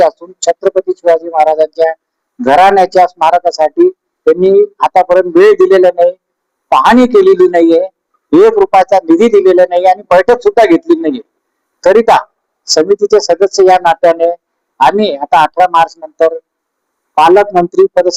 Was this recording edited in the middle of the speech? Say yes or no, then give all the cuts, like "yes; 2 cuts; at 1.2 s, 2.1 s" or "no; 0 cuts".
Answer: no; 0 cuts